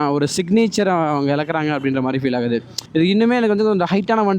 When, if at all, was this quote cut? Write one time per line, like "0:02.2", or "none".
0:02.7